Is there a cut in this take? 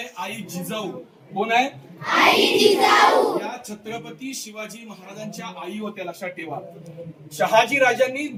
no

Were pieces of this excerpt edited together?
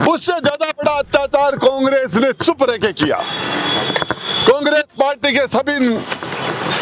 no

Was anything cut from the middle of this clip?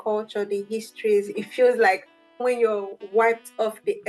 yes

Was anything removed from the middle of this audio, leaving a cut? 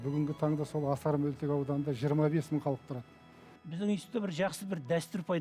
yes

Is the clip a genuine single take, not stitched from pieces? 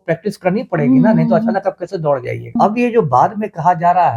no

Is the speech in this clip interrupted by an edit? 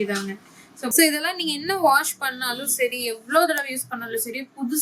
yes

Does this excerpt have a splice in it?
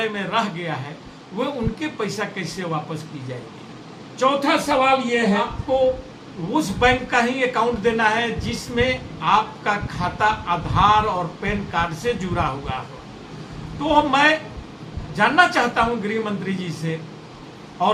no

